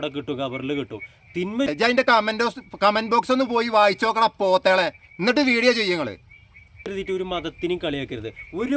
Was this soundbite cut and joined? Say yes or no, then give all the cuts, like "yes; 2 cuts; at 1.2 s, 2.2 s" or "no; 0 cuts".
yes; 2 cuts; at 1.7 s, 6.7 s